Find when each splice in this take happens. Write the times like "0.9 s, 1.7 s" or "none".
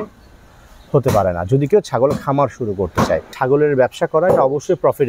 3.3 s